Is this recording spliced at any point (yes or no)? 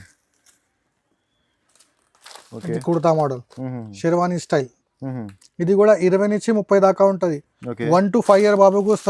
no